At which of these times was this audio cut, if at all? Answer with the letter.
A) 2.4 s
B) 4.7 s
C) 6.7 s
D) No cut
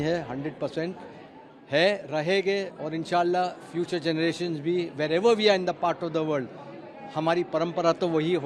D